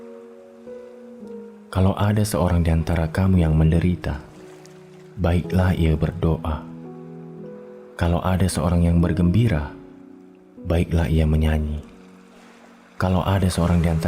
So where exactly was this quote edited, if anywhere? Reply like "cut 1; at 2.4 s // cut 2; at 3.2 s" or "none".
cut 1; at 6.6 s // cut 2; at 7.9 s